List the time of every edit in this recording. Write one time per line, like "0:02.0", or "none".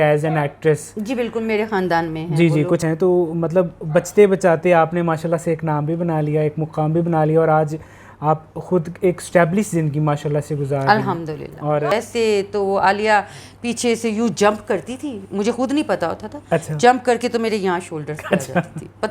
0:02.8
0:11.9